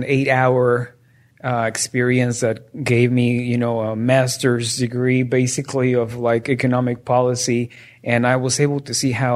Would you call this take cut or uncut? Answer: uncut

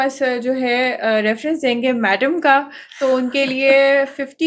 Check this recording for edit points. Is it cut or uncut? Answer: uncut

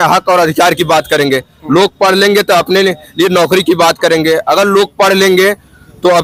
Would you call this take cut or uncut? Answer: uncut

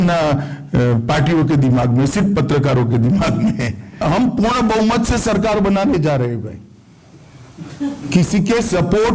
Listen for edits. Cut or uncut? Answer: cut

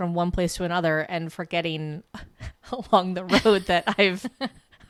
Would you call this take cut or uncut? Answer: uncut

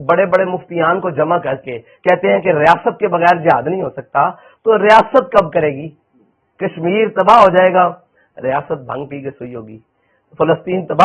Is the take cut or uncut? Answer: uncut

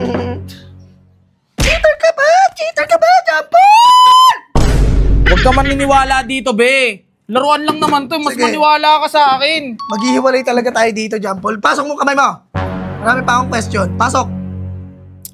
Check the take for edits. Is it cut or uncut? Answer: uncut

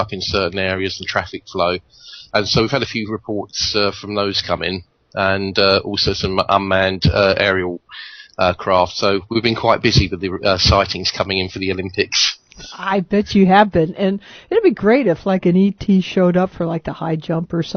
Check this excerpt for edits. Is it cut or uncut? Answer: uncut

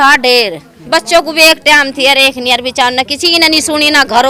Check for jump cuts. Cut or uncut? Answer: uncut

